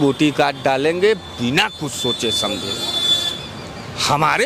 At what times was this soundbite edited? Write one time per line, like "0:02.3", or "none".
none